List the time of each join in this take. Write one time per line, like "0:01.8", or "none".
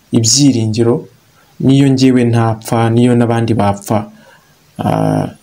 none